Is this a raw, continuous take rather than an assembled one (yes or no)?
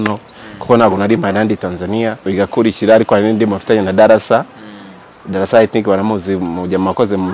no